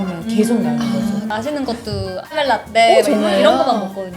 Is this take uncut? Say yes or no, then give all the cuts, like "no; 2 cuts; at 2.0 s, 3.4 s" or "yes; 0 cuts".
no; 2 cuts; at 1.3 s, 2.3 s